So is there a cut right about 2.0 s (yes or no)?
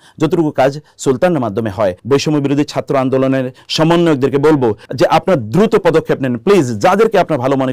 yes